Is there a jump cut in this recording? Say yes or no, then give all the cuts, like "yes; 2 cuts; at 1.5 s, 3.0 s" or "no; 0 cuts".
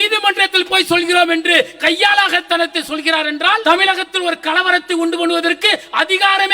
yes; 1 cut; at 3.6 s